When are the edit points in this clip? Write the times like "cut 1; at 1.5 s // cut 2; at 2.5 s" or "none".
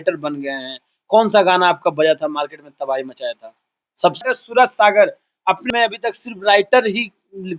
cut 1; at 4.2 s // cut 2; at 5.7 s